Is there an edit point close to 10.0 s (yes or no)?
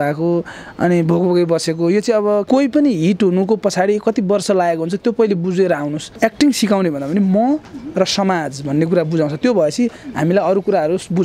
no